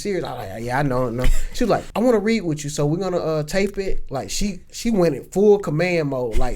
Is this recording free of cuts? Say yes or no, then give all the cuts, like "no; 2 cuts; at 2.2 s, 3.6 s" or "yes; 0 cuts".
no; 1 cut; at 1.9 s